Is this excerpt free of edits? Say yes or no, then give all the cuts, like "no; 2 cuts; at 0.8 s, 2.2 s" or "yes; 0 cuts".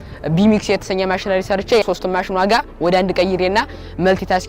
no; 1 cut; at 1.8 s